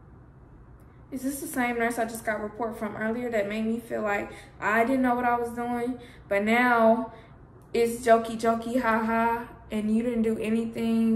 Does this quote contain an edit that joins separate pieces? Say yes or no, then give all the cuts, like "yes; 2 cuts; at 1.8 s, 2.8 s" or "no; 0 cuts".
no; 0 cuts